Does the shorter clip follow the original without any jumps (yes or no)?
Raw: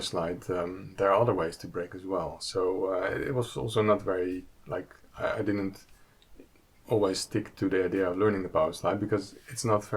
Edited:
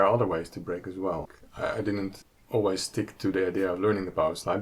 no